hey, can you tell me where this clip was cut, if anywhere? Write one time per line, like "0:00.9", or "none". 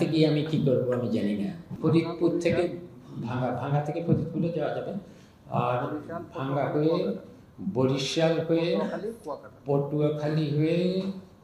0:01.7